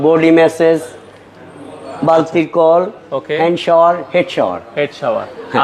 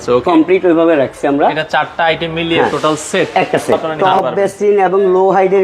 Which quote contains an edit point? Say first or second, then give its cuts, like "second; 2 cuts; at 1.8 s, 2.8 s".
second; 1 cut; at 3.9 s